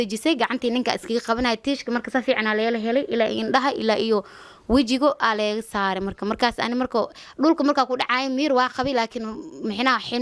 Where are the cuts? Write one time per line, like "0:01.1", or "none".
none